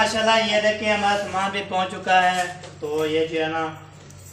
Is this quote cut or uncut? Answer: uncut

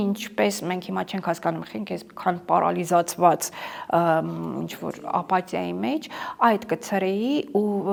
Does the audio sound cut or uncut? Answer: uncut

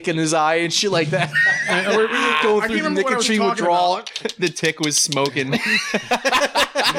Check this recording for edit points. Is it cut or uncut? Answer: uncut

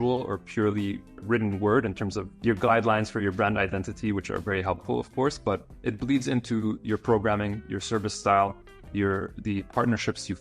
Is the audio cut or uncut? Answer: cut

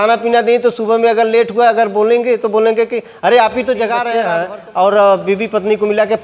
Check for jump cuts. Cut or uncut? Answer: cut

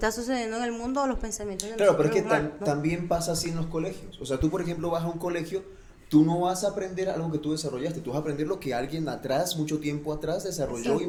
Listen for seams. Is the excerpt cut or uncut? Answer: uncut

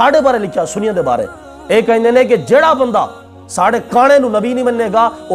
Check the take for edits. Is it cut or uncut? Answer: uncut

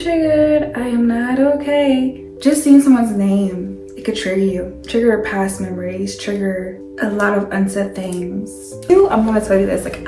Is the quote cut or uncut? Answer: cut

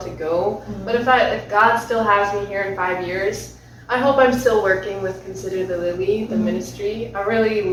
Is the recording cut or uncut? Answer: uncut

